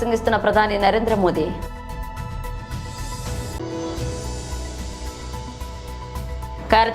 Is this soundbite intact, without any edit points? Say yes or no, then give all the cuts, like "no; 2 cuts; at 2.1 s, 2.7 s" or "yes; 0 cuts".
yes; 0 cuts